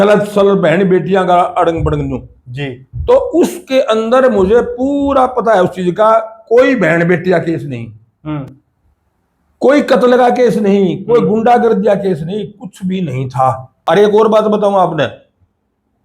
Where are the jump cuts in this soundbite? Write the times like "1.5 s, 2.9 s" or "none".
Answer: 13.7 s

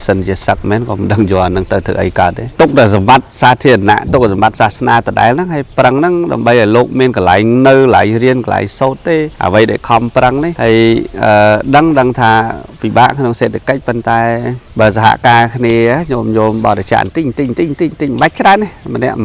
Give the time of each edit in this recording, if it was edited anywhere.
2.4 s, 9.3 s, 10.5 s, 14.6 s

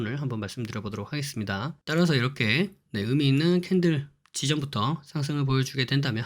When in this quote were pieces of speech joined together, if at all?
1.8 s

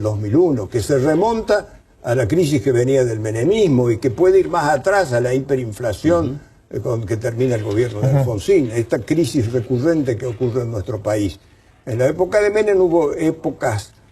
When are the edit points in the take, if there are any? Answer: none

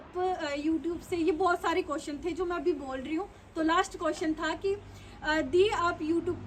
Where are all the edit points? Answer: none

